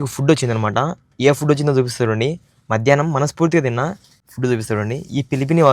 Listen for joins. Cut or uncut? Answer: uncut